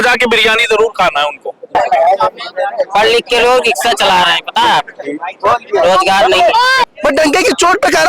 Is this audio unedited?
no; 2 cuts; at 1.8 s, 6.8 s

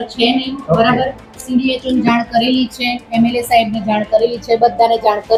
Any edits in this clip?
no; 0 cuts

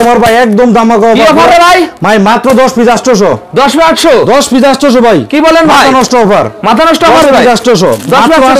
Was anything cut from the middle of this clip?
no; 0 cuts

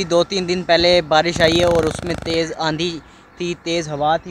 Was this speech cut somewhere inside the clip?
no; 0 cuts

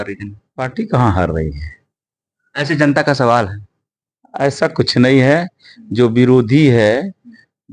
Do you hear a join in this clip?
no; 0 cuts

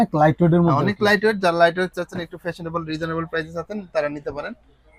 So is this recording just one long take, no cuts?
yes; 0 cuts

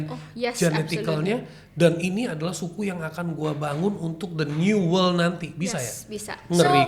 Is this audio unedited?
yes; 0 cuts

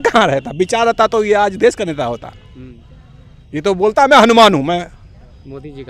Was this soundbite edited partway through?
no; 0 cuts

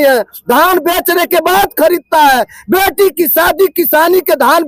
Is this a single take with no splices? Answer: yes; 0 cuts

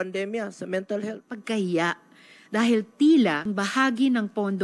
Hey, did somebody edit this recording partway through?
yes; 2 cuts; at 1.3 s, 3.4 s

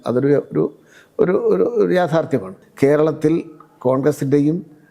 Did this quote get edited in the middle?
yes; 1 cut; at 2.6 s

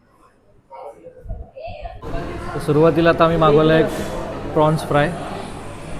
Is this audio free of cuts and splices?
no; 1 cut; at 2.0 s

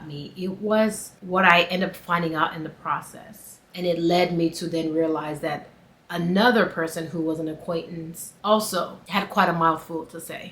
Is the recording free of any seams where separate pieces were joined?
no; 1 cut; at 3.6 s

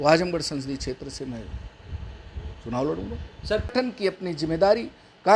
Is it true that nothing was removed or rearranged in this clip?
no; 1 cut; at 3.7 s

